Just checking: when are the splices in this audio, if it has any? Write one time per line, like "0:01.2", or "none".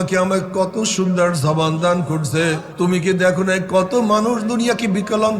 0:02.7